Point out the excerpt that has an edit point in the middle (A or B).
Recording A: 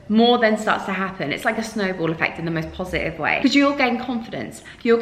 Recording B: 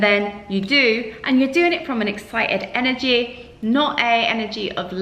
A